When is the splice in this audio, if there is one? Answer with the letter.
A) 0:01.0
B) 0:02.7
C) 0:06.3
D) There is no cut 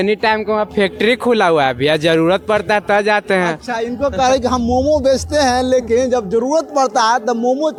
D